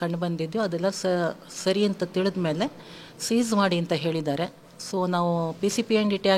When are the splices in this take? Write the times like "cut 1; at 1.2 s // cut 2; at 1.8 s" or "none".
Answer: none